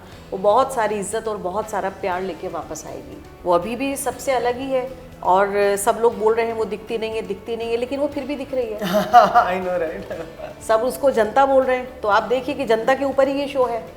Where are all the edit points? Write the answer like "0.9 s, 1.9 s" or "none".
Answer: 3.3 s

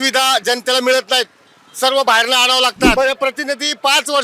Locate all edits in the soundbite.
2.9 s

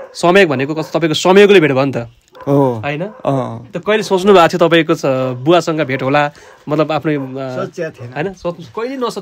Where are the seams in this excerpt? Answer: none

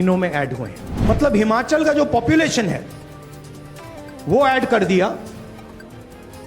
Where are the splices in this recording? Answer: 0.9 s

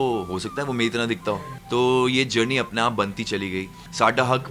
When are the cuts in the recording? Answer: 1.5 s

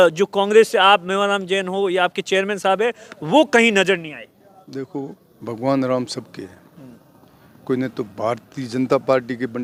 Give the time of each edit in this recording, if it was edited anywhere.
none

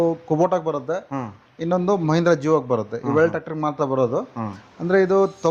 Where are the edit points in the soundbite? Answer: none

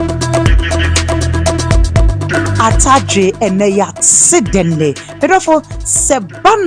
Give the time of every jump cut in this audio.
1.2 s

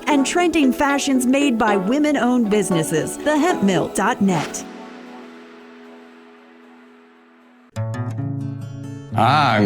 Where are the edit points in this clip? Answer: 7.2 s

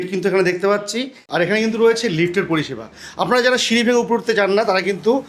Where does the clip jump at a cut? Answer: 1.3 s

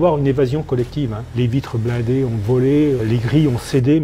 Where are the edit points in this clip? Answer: 1.3 s, 3.0 s

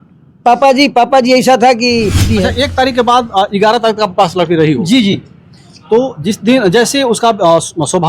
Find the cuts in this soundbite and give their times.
2.3 s

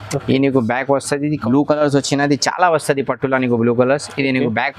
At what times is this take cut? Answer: 1.4 s

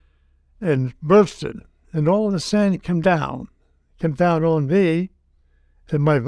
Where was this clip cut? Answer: none

